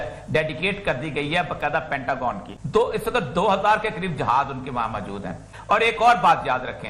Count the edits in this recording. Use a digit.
2